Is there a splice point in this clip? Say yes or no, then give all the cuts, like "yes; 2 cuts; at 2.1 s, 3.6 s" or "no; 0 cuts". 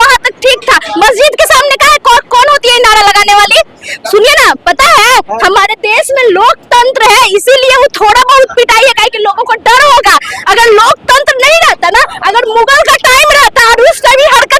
no; 0 cuts